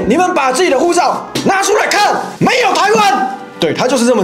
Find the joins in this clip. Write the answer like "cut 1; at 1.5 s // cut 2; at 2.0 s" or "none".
none